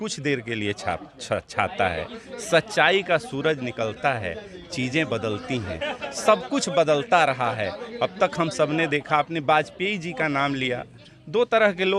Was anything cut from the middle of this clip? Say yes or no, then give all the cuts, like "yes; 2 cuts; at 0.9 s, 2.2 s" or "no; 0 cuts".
no; 0 cuts